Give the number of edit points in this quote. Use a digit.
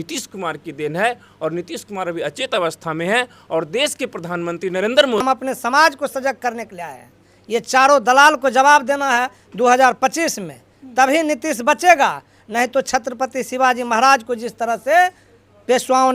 1